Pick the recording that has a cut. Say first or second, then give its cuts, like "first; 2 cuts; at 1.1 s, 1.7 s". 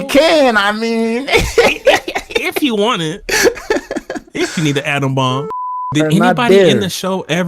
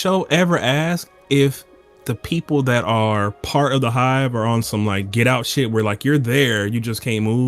first; 1 cut; at 5.9 s